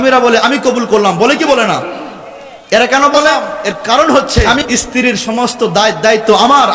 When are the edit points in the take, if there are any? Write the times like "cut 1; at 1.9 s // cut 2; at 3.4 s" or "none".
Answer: cut 1; at 3.5 s